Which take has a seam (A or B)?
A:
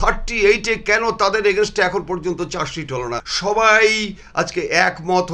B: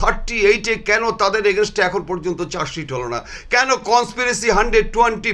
A